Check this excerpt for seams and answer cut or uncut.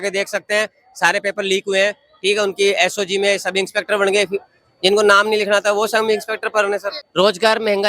cut